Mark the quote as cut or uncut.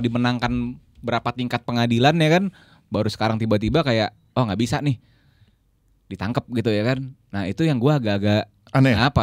uncut